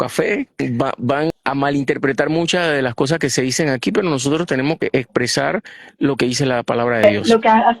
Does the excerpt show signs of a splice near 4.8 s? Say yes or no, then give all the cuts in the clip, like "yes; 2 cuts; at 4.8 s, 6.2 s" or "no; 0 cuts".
yes; 3 cuts; at 1.1 s, 4.8 s, 7.0 s